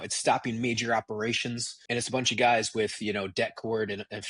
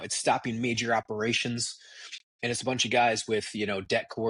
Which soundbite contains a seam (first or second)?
first